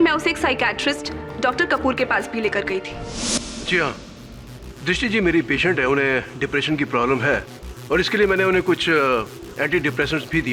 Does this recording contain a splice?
no; 0 cuts

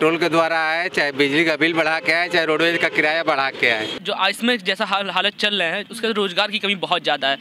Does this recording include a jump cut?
yes; 1 cut; at 3.9 s

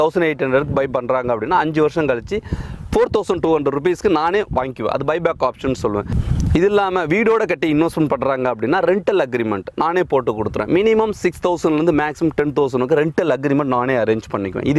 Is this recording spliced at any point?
no; 0 cuts

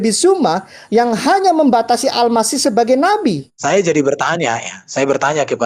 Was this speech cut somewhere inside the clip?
yes; 1 cut; at 3.5 s

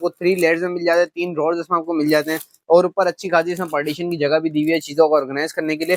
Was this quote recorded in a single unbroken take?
yes; 0 cuts

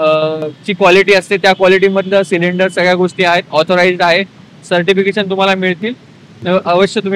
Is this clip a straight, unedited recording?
yes; 0 cuts

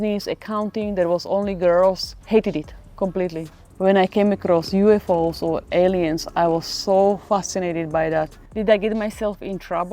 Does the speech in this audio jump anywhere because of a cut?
yes; 2 cuts; at 3.7 s, 8.4 s

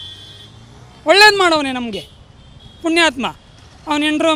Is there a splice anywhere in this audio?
no; 0 cuts

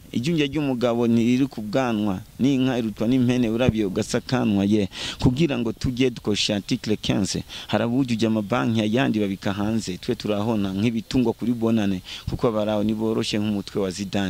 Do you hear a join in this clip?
no; 0 cuts

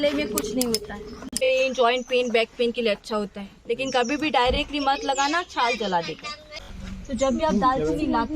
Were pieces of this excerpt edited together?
yes; 2 cuts; at 1.4 s, 6.6 s

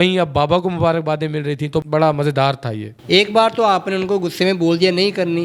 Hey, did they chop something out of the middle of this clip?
yes; 2 cuts; at 1.8 s, 2.9 s

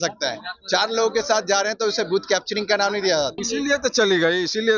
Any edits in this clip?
yes; 1 cut; at 3.4 s

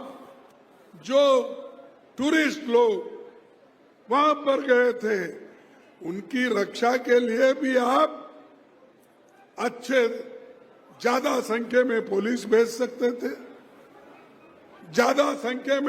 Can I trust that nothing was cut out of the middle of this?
yes; 0 cuts

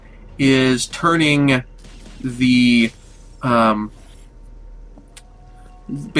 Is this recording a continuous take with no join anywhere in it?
no; 1 cut; at 4.4 s

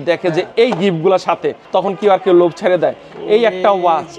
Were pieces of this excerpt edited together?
yes; 1 cut; at 1.6 s

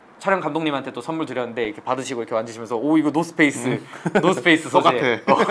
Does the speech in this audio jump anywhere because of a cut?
no; 0 cuts

